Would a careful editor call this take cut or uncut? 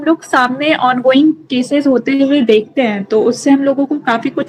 uncut